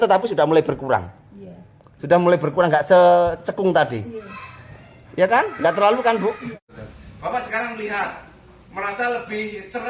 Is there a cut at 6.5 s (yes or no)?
yes